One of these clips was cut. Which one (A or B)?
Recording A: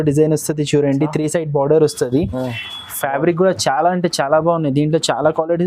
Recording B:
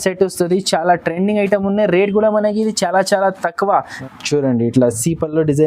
B